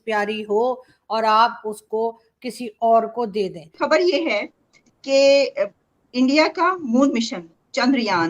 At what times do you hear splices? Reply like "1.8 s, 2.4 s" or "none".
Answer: 3.6 s